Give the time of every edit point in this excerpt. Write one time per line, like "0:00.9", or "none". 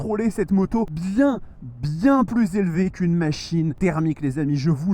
0:01.0
0:03.7